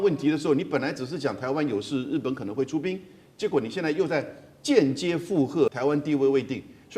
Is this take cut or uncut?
cut